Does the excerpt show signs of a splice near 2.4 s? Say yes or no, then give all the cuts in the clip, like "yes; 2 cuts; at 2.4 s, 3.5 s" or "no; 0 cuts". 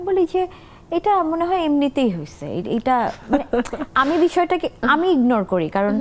no; 0 cuts